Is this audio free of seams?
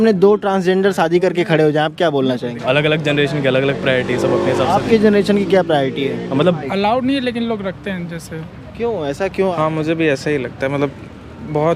no; 3 cuts; at 2.6 s, 6.7 s, 9.5 s

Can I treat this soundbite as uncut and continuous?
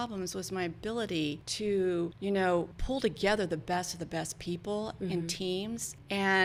yes; 0 cuts

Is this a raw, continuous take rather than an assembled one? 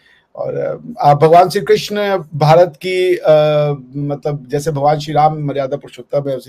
yes; 0 cuts

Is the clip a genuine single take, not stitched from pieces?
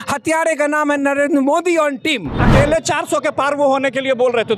no; 1 cut; at 2.4 s

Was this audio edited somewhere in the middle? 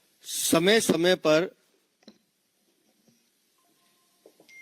no; 0 cuts

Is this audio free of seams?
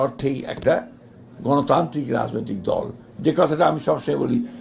yes; 0 cuts

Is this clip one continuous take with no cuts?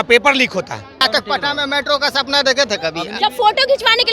no; 2 cuts; at 1.0 s, 3.0 s

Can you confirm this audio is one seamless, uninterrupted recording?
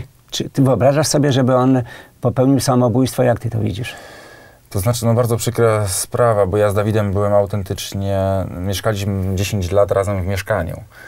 yes; 0 cuts

